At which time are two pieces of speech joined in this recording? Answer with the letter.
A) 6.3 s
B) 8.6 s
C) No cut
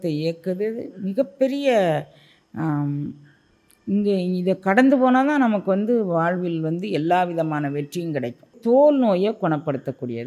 B